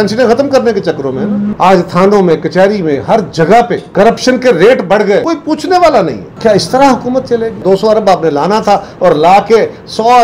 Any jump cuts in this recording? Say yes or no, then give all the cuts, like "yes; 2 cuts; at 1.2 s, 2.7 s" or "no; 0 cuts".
yes; 3 cuts; at 1.5 s, 6.2 s, 7.6 s